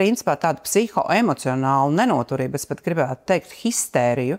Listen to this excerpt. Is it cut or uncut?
uncut